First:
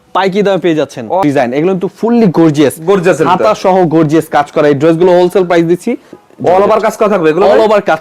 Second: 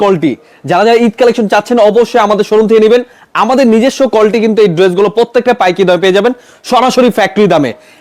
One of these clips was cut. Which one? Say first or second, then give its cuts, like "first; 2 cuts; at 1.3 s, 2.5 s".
first; 2 cuts; at 1.2 s, 6.1 s